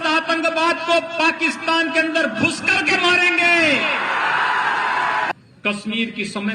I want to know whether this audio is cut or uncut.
cut